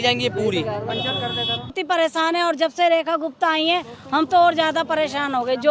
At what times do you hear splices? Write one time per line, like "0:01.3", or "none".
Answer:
0:01.8